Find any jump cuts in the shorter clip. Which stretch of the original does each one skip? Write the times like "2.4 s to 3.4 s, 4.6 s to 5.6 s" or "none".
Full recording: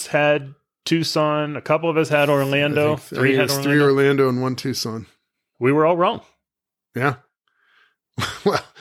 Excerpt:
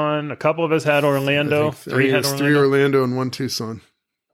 none